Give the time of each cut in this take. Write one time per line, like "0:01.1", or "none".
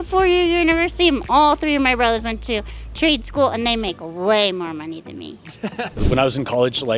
0:05.8